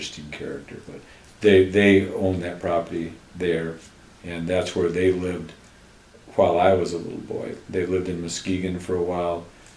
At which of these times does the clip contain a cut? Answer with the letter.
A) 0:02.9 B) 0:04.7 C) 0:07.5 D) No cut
D